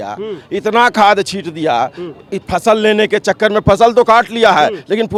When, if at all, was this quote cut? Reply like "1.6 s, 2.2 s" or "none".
none

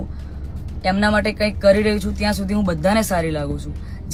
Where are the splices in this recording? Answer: none

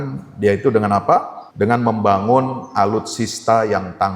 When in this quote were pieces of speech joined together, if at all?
1.4 s

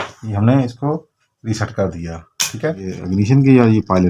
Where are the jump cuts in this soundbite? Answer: 2.9 s

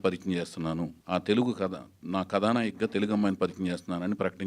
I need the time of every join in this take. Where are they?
1.0 s

